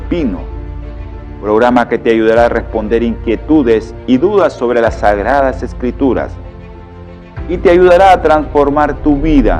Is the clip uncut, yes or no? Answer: yes